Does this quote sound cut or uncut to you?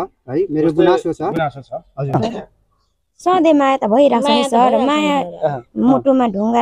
cut